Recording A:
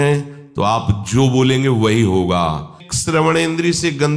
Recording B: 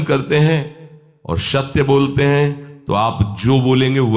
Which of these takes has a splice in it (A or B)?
A